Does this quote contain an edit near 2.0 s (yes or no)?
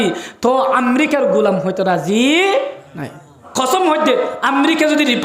no